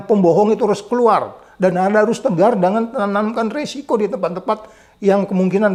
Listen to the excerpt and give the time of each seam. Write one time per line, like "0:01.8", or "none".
none